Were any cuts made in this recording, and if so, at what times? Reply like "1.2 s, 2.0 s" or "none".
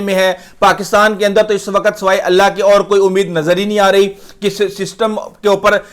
none